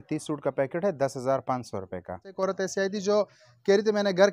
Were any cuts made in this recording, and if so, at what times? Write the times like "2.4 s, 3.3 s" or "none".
2.3 s